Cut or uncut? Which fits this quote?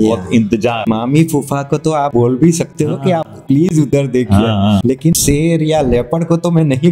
cut